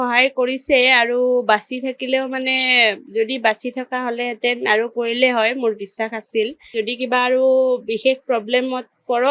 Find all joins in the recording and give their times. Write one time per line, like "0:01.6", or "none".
0:06.7